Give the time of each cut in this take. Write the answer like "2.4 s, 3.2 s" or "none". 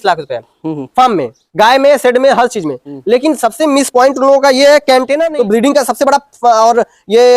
5.3 s